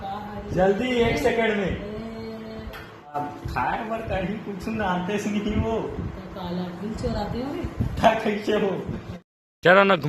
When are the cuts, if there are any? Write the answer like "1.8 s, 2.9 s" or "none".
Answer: 3.1 s, 9.2 s

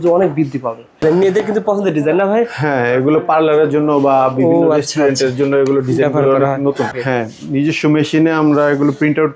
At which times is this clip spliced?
1.0 s, 7.0 s

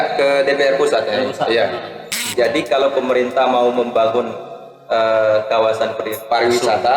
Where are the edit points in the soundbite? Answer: 2.2 s

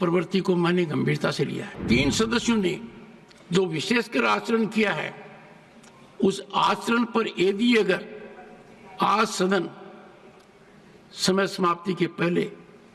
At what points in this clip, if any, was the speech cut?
1.8 s

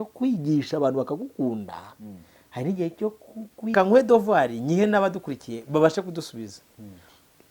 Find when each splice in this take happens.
3.7 s

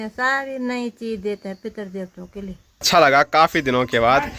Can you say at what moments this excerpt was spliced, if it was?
2.9 s

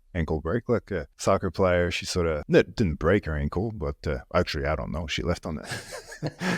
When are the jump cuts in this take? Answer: 1.1 s, 2.4 s

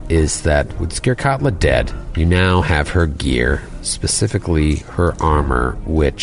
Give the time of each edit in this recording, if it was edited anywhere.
2.0 s

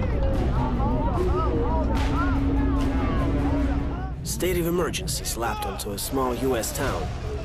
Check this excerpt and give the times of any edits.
3.7 s

